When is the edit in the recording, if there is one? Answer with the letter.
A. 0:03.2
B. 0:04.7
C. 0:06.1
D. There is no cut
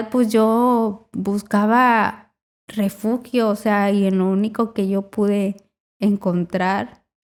D